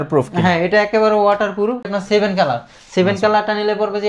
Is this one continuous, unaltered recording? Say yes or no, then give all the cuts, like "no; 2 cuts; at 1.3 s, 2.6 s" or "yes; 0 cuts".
no; 1 cut; at 1.9 s